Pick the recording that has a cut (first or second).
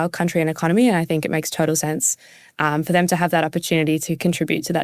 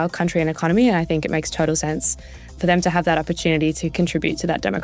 second